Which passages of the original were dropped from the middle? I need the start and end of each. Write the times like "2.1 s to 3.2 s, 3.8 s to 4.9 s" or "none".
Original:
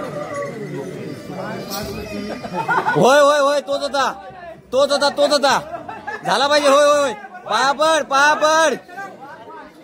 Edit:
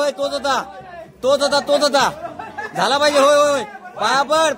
none